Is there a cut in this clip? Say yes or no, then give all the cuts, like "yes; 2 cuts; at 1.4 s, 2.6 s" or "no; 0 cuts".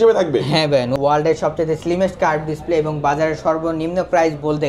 yes; 1 cut; at 0.9 s